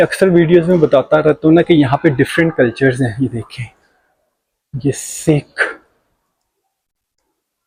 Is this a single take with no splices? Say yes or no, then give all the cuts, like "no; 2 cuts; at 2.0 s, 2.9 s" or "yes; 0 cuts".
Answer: yes; 0 cuts